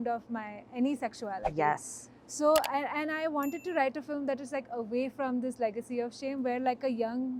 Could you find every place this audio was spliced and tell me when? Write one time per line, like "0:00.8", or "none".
none